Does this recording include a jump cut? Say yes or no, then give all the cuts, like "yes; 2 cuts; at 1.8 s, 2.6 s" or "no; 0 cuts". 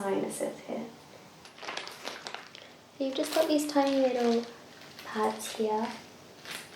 yes; 1 cut; at 1.5 s